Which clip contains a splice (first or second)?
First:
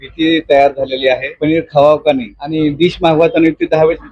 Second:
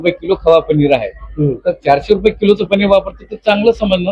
first